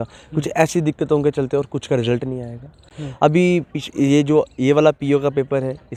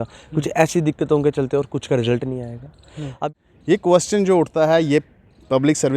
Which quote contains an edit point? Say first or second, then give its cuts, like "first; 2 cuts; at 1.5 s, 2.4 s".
second; 1 cut; at 3.1 s